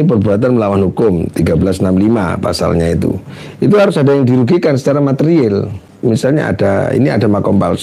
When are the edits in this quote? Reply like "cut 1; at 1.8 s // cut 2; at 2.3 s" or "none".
cut 1; at 5.8 s